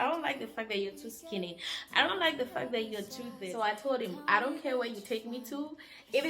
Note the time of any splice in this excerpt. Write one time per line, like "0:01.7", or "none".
0:03.4